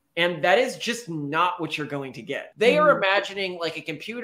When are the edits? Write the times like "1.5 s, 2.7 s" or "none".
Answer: 2.5 s